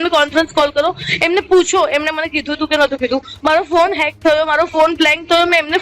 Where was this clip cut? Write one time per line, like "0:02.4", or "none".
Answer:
none